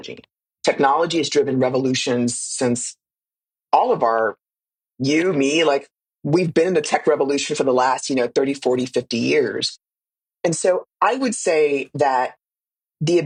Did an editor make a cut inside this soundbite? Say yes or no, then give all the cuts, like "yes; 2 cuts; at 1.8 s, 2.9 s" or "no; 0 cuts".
no; 0 cuts